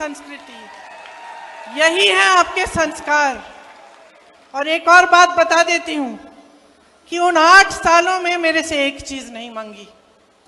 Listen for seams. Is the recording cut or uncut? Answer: uncut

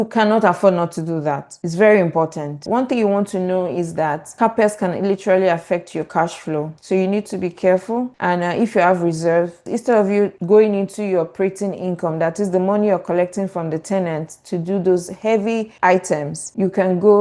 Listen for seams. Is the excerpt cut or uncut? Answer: cut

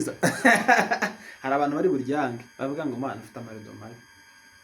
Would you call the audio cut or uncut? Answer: uncut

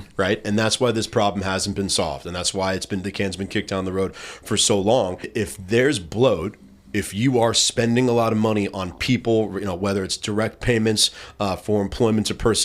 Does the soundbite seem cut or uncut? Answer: cut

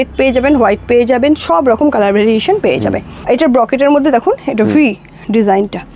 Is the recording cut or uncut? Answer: cut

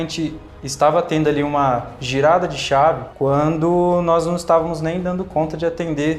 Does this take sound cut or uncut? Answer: cut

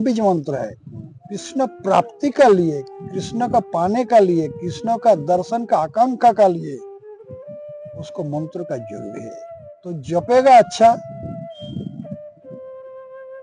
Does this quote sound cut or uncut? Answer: cut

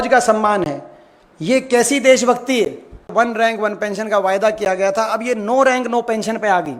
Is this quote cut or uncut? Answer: cut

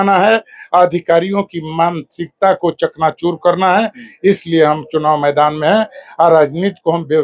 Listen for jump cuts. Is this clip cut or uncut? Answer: uncut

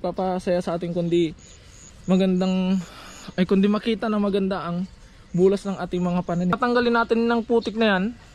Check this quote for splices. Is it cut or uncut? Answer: cut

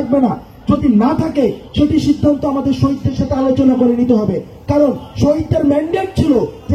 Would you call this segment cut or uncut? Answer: uncut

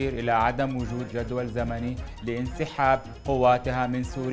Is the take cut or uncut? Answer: uncut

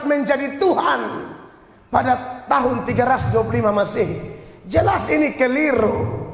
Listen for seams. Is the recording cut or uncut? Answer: uncut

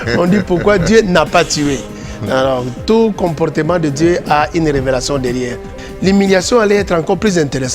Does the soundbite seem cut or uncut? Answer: cut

